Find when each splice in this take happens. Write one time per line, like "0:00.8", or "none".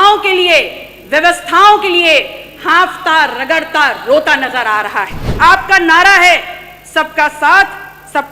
0:05.2